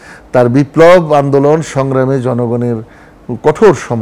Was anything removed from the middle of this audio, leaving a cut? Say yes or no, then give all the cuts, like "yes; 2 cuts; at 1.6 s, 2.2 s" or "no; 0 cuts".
no; 0 cuts